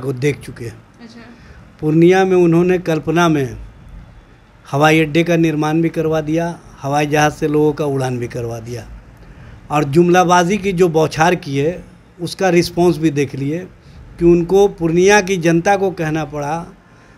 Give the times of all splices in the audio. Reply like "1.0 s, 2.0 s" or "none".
none